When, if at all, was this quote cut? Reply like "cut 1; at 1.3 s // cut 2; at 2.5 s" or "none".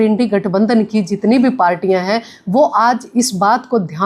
none